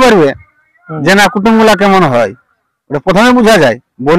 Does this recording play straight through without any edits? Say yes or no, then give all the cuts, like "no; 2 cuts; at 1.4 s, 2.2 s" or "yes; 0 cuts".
yes; 0 cuts